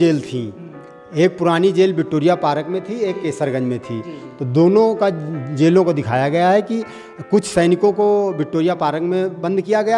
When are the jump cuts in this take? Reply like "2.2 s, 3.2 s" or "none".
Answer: none